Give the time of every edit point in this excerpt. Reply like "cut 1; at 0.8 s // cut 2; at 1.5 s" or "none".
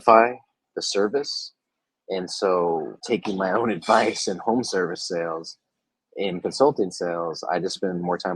cut 1; at 2.9 s